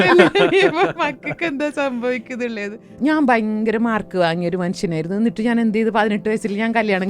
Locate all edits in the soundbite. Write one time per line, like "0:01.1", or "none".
0:02.9